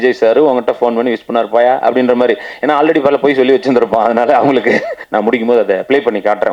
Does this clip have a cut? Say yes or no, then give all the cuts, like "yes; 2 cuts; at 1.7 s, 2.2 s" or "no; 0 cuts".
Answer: yes; 1 cut; at 5.0 s